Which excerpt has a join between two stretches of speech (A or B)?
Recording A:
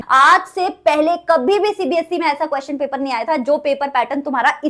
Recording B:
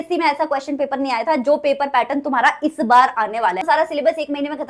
B